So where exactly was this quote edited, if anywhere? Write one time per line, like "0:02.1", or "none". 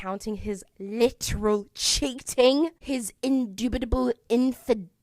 none